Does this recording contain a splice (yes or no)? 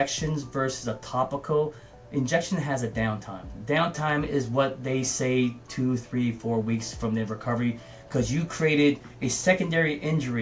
no